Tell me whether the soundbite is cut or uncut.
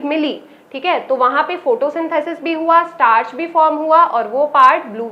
uncut